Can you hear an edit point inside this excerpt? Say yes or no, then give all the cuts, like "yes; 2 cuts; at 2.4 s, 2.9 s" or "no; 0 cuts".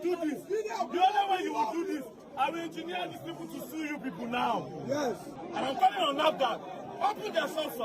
yes; 1 cut; at 5.3 s